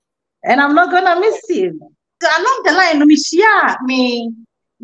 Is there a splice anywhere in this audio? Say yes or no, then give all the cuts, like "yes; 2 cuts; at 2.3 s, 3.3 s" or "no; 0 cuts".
yes; 1 cut; at 2.1 s